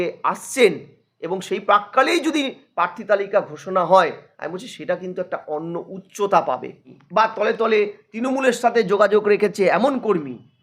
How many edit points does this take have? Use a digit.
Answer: 1